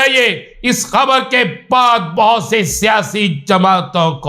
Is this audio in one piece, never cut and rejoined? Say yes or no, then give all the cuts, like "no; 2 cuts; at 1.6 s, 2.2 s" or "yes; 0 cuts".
yes; 0 cuts